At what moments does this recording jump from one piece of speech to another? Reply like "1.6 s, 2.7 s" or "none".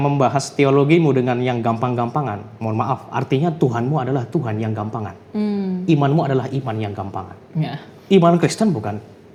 none